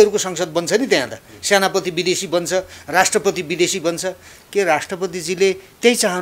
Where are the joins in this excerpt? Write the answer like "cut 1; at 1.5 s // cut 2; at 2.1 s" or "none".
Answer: none